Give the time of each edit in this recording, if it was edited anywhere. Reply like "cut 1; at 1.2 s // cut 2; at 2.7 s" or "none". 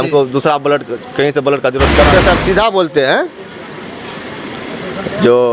cut 1; at 2.0 s